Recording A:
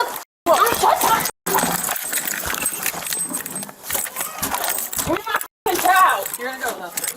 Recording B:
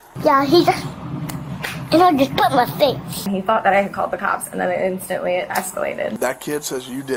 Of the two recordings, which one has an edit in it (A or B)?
A